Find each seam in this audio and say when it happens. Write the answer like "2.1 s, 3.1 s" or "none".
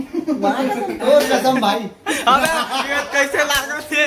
none